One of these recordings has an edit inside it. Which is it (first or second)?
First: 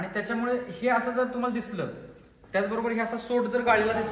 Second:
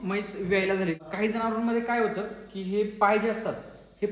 second